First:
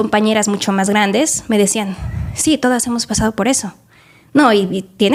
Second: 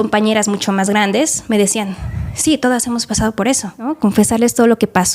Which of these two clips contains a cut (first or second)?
second